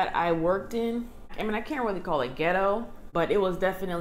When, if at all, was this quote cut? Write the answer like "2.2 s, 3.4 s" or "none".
1.2 s, 3.0 s